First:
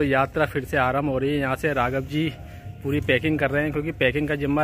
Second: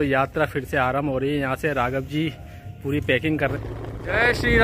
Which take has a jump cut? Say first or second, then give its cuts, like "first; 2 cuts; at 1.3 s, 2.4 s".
second; 1 cut; at 3.5 s